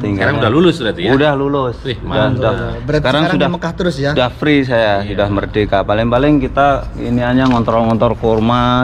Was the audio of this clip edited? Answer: no; 0 cuts

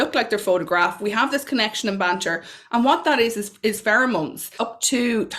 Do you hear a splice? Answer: yes; 1 cut; at 4.4 s

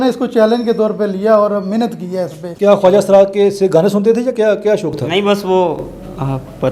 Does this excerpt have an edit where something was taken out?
yes; 1 cut; at 2.4 s

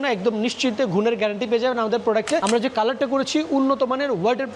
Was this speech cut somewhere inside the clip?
yes; 1 cut; at 2.4 s

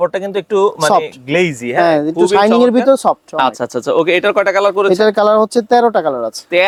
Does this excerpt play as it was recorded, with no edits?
yes; 0 cuts

